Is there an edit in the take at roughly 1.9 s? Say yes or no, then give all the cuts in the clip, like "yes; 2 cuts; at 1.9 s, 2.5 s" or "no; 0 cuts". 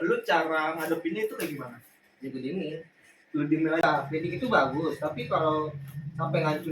no; 1 cut; at 3.8 s